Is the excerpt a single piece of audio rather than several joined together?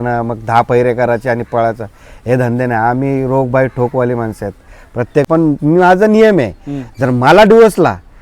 no; 1 cut; at 5.3 s

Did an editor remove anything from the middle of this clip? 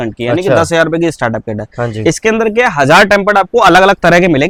no; 0 cuts

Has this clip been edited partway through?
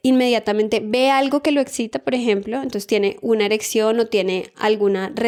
no; 0 cuts

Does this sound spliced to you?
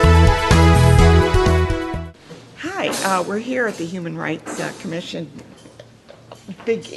no; 0 cuts

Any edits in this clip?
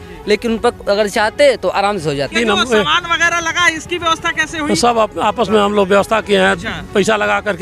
yes; 1 cut; at 2.3 s

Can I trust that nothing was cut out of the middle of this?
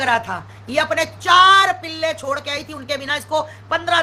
yes; 0 cuts

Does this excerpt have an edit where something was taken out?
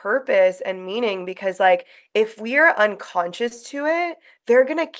no; 0 cuts

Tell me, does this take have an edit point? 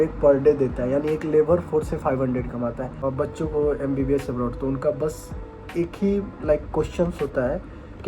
yes; 1 cut; at 3.0 s

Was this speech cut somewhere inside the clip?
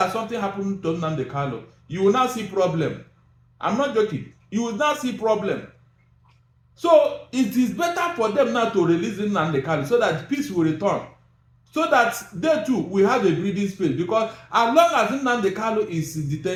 no; 0 cuts

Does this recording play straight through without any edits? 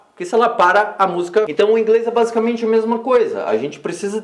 no; 1 cut; at 1.5 s

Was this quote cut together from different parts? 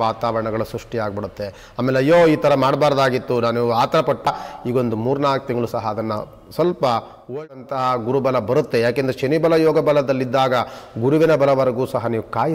yes; 2 cuts; at 4.3 s, 7.4 s

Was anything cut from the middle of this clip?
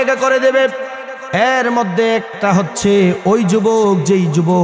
no; 0 cuts

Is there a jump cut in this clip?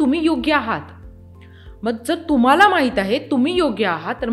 no; 0 cuts

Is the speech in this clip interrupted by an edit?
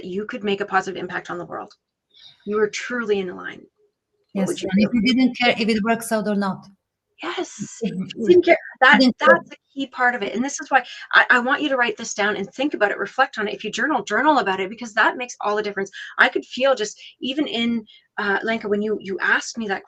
no; 0 cuts

